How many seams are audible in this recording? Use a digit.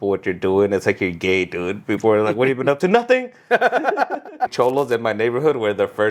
1